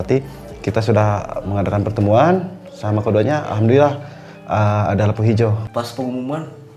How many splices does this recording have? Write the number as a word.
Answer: one